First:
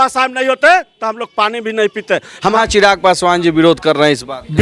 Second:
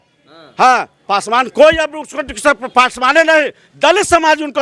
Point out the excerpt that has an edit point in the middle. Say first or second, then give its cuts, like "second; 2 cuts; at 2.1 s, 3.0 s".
first; 1 cut; at 2.5 s